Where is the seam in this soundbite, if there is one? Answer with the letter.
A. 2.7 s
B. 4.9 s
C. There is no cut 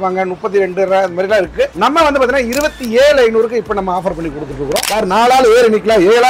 B